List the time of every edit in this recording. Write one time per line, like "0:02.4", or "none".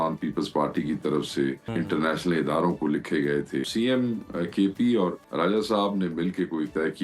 0:01.6
0:03.7
0:05.2